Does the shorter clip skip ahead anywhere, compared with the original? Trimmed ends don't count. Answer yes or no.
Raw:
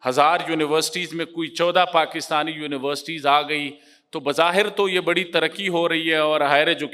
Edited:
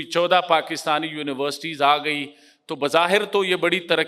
no